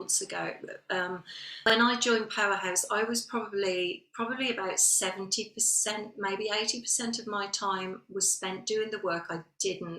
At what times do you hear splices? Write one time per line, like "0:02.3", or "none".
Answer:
0:01.7